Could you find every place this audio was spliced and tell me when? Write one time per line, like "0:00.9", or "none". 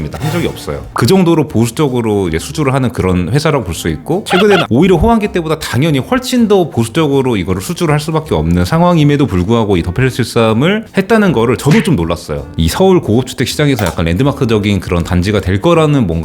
0:04.6
0:12.6